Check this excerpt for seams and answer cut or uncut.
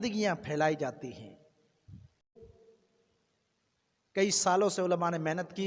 cut